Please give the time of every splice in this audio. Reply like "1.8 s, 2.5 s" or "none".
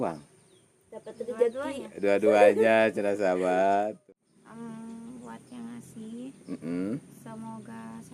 4.0 s